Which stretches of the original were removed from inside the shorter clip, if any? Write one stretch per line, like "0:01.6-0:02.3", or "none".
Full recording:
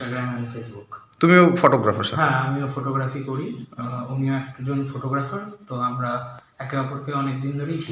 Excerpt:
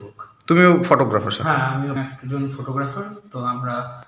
0:02.7-0:04.3

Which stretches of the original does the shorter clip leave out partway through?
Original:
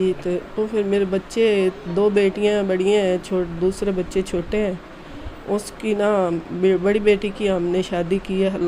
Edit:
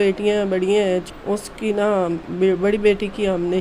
0:03.2-0:05.3

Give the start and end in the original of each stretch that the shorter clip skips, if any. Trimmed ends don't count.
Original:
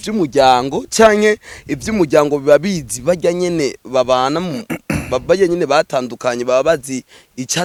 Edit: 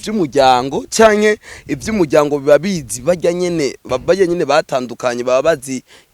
0:03.8-0:05.0

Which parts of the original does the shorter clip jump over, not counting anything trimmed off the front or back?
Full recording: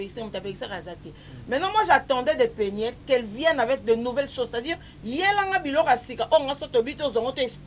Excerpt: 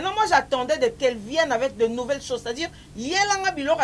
0:02.5-0:03.0

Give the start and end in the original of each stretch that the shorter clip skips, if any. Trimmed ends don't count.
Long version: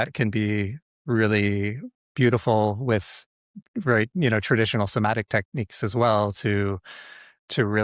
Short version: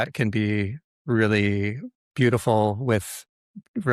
none

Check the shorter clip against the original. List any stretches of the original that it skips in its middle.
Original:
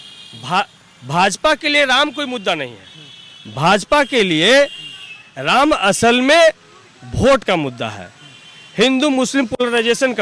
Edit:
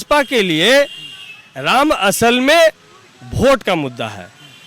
none

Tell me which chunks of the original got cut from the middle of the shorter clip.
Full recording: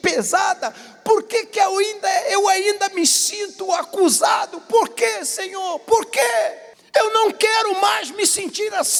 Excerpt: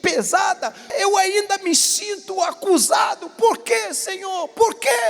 0:00.9-0:02.3

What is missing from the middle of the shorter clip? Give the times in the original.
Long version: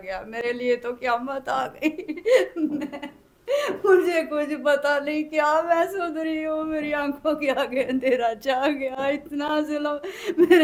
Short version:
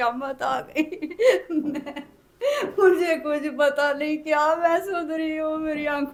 none

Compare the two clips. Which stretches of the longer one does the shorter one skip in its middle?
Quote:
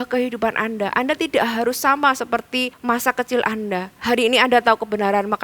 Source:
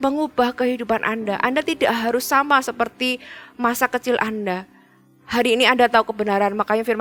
0:03.2-0:03.5
0:04.7-0:05.2

